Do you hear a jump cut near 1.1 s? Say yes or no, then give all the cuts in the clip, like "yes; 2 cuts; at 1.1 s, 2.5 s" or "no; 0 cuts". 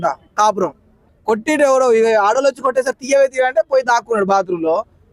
yes; 1 cut; at 1.1 s